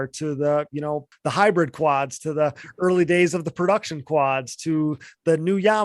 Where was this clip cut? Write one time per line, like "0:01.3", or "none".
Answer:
0:01.1